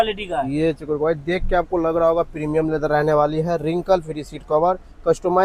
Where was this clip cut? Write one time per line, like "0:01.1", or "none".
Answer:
none